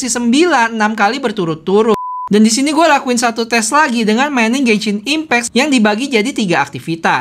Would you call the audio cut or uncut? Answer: cut